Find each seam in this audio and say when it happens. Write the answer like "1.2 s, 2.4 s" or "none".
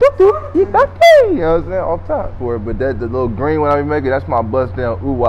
2.3 s